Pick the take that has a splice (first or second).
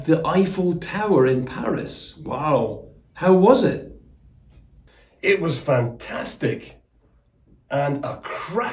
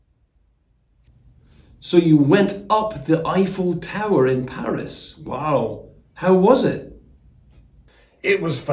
second